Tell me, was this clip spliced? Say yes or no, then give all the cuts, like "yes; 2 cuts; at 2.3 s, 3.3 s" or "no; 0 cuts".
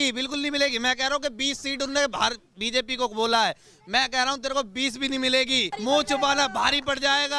yes; 1 cut; at 5.7 s